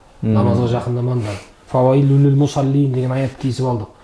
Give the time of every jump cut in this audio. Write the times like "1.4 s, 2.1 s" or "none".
none